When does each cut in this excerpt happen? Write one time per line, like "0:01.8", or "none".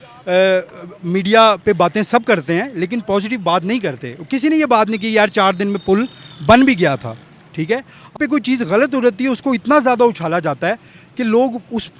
0:08.2